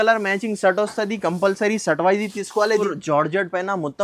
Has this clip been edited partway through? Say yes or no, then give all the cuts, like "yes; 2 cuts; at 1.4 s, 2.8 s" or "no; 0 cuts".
yes; 1 cut; at 2.8 s